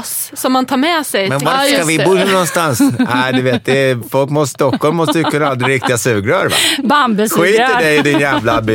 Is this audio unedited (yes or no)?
yes